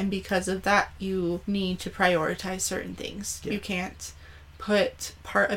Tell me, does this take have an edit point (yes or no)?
yes